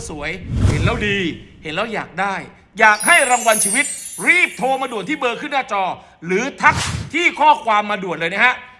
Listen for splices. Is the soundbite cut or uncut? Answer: uncut